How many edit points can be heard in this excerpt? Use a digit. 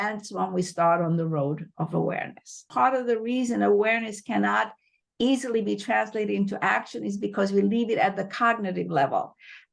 1